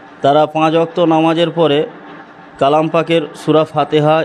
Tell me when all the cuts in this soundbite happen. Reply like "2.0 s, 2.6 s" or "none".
none